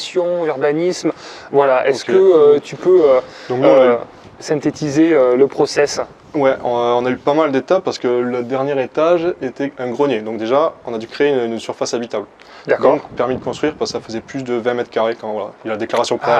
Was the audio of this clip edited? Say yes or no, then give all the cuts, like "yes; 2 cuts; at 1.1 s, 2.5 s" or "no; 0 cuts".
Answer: no; 0 cuts